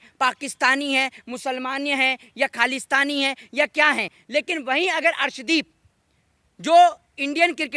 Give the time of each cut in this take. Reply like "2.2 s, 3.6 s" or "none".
none